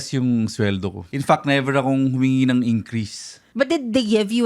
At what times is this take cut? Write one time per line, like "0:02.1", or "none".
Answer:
0:01.1
0:03.4